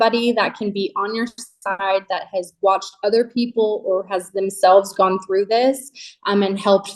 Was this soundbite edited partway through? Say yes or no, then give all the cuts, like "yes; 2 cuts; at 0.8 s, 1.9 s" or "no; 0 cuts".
no; 0 cuts